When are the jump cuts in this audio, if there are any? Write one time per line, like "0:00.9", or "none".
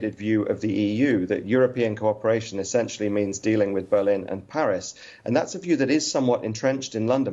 none